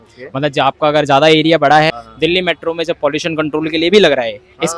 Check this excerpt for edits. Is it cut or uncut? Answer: cut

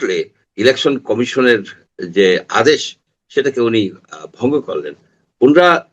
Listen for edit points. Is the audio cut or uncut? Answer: uncut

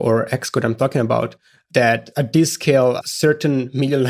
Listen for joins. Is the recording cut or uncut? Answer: cut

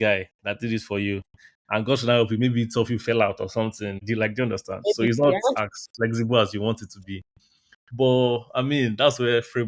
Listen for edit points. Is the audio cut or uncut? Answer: cut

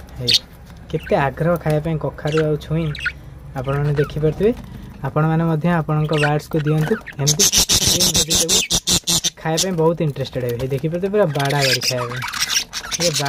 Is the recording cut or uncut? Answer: uncut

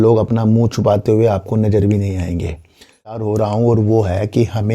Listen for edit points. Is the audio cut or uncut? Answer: cut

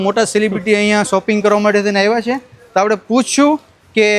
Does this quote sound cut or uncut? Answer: uncut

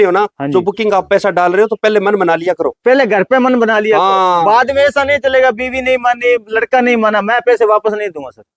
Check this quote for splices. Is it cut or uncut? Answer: uncut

